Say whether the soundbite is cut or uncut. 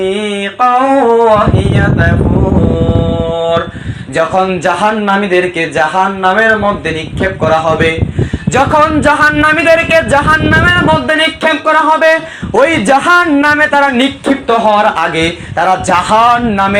uncut